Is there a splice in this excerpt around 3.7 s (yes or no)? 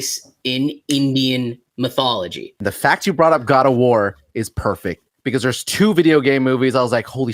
no